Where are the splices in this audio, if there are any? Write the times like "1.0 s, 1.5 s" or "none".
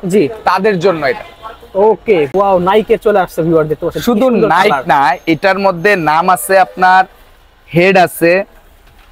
2.3 s